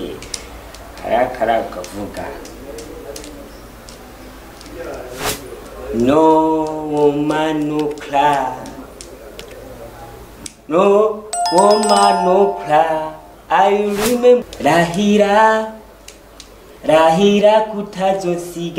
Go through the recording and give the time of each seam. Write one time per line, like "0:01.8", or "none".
0:14.4